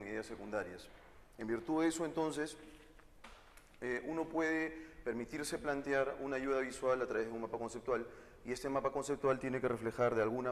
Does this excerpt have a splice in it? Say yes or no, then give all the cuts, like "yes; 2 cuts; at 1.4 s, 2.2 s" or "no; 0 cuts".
yes; 1 cut; at 6.6 s